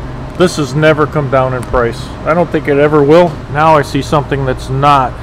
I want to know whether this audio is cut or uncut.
cut